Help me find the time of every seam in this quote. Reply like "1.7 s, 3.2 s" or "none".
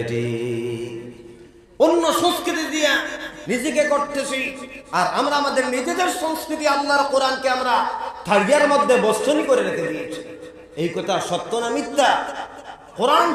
none